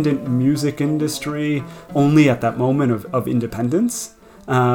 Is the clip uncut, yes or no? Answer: yes